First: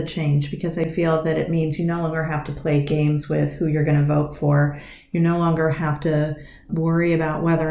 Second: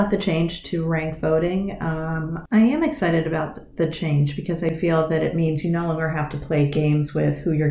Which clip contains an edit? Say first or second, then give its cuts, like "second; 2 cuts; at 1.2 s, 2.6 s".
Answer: second; 1 cut; at 2.5 s